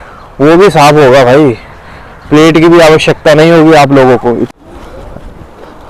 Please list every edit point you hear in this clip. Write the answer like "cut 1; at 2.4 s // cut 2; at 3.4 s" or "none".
cut 1; at 4.5 s